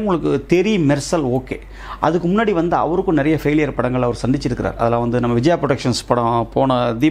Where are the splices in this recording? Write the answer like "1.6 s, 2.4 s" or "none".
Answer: none